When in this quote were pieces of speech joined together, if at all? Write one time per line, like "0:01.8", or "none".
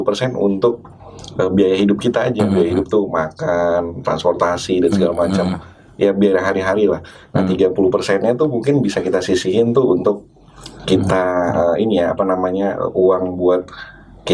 none